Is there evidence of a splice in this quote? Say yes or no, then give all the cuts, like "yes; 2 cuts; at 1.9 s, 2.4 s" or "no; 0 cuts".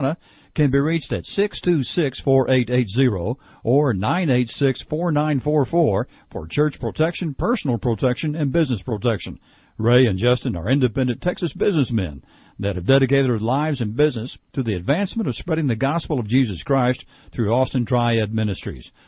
no; 0 cuts